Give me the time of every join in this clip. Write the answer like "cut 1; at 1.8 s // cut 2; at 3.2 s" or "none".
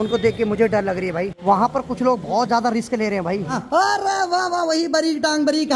cut 1; at 1.4 s // cut 2; at 3.6 s